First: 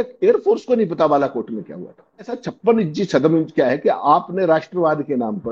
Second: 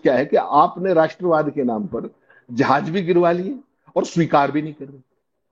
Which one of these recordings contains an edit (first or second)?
first